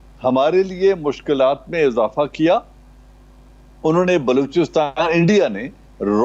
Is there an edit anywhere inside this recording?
no; 0 cuts

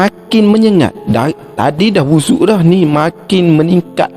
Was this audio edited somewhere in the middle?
no; 0 cuts

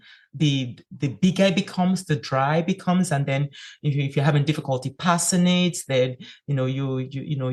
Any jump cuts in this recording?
no; 0 cuts

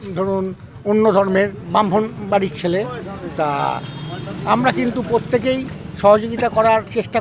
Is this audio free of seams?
yes; 0 cuts

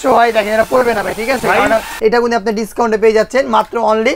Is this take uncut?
no; 1 cut; at 1.9 s

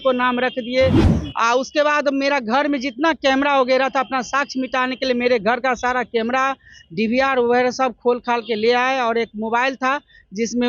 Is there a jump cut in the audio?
yes; 1 cut; at 1.1 s

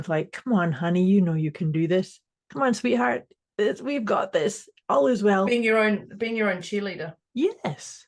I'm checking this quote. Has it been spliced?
no; 0 cuts

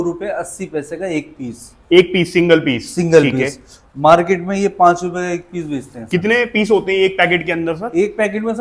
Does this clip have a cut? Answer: no; 0 cuts

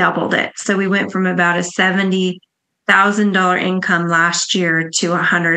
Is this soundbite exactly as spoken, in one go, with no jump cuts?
yes; 0 cuts

